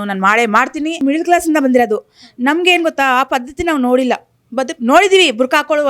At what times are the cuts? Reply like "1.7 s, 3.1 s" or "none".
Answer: 1.0 s